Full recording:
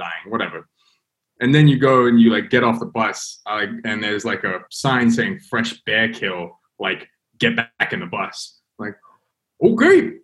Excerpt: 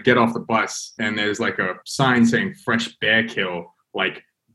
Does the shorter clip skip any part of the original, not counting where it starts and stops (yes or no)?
yes